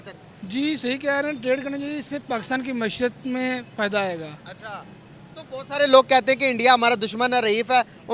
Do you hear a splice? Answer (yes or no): no